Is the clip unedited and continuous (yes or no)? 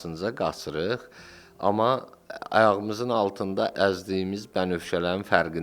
no